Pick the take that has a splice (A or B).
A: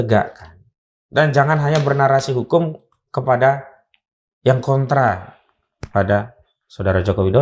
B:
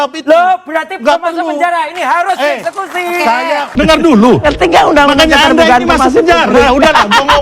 B